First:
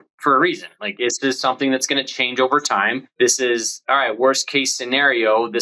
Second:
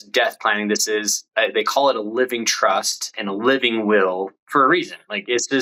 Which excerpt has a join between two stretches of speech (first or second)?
first